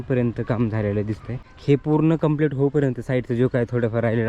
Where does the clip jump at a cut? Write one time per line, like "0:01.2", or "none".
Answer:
0:01.5